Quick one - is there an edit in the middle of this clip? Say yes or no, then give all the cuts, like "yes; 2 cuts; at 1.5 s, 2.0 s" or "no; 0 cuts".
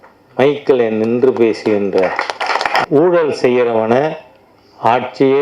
yes; 1 cut; at 2.8 s